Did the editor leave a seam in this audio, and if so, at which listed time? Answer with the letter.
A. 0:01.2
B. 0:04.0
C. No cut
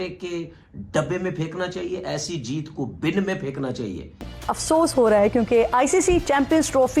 B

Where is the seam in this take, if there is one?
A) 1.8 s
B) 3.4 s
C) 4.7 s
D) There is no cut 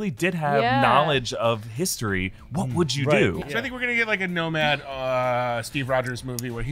B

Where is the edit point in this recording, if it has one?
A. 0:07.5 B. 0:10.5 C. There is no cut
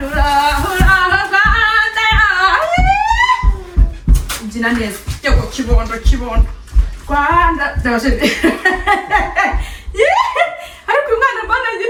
C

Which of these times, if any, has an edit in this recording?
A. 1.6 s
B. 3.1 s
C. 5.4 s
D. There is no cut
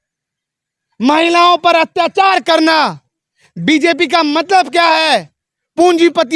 D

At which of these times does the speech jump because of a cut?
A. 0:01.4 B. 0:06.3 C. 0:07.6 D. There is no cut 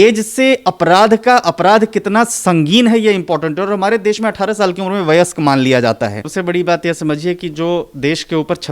B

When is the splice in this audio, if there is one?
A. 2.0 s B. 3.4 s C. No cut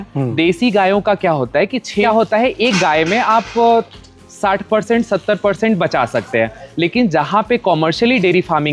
A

